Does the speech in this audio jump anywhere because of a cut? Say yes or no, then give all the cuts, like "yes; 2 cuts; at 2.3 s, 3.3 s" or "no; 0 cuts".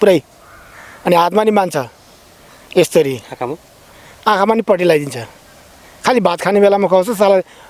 no; 0 cuts